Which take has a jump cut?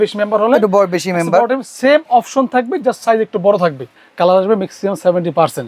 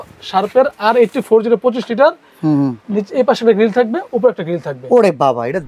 first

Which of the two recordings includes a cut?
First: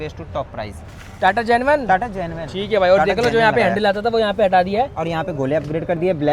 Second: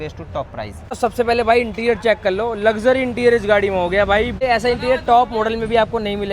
second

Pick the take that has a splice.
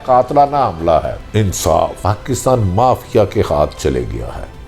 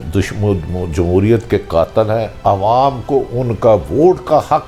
first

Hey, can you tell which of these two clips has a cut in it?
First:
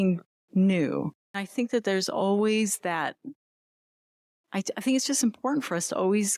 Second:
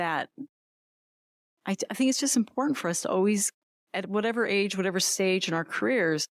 first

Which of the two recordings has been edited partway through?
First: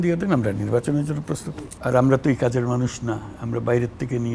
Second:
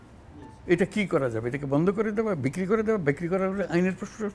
first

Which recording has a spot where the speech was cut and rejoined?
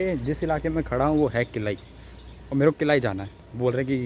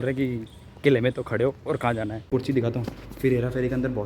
second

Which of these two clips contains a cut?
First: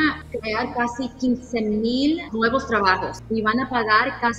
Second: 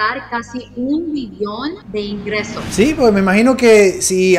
second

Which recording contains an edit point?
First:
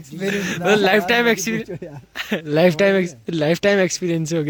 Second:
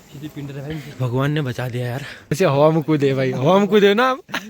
second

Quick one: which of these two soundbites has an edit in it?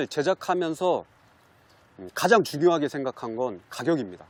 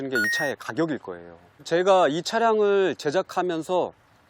second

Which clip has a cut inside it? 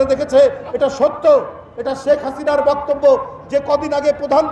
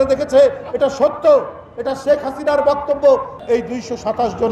second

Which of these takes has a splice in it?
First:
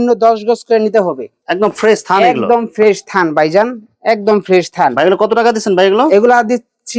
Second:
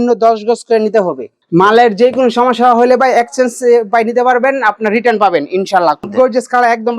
second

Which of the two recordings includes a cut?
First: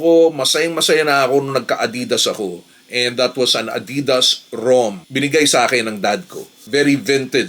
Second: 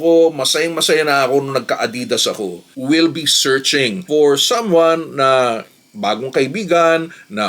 second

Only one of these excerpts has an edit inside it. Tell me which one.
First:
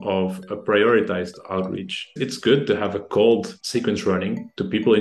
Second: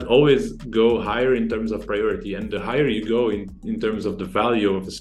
first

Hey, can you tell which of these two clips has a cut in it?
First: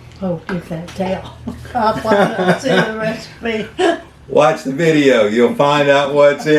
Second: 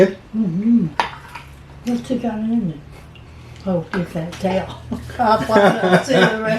second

